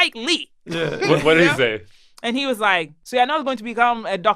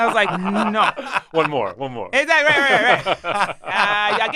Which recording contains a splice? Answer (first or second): first